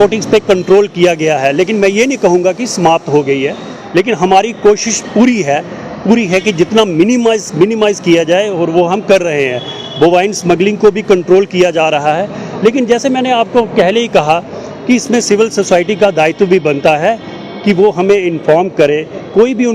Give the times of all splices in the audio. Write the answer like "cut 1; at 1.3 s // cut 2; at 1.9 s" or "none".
none